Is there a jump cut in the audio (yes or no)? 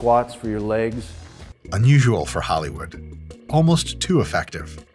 no